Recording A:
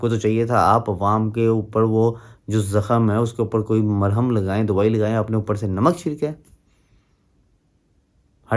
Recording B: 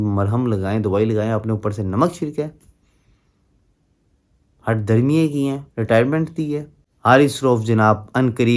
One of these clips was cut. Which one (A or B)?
B